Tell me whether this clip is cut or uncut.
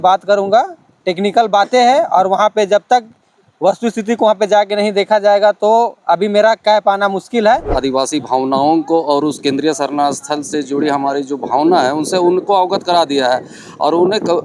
cut